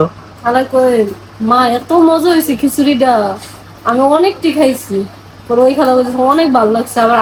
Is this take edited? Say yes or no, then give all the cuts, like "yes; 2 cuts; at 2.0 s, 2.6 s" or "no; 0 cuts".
no; 0 cuts